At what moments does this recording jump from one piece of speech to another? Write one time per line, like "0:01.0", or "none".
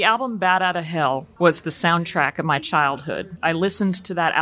0:01.3
0:03.4